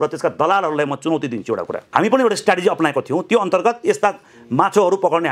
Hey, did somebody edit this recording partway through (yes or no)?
yes